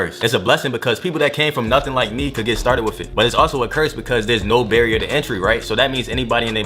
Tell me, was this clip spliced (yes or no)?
no